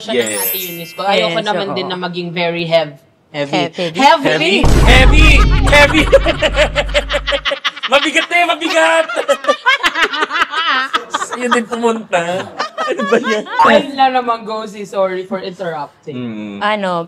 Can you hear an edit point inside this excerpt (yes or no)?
no